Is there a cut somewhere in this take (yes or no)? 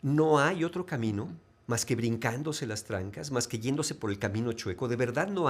no